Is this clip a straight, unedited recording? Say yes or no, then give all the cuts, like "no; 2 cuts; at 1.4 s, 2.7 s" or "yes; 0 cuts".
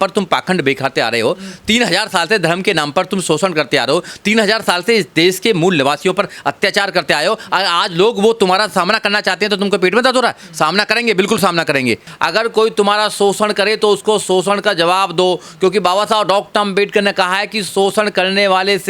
no; 1 cut; at 12.1 s